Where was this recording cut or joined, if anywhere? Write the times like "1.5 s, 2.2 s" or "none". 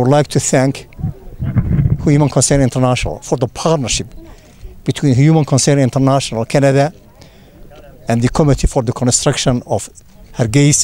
none

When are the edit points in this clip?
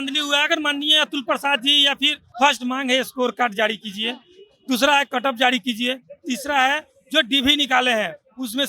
2.2 s

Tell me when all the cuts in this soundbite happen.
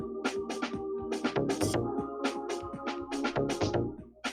none

